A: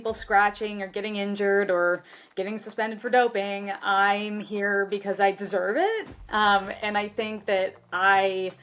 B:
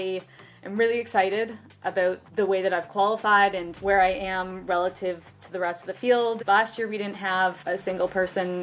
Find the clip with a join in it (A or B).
B